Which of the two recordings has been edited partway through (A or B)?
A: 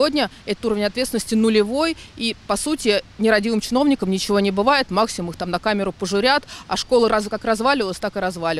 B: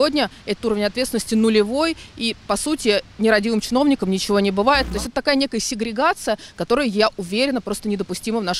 B